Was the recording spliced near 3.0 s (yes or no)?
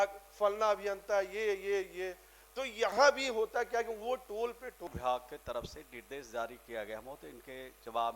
no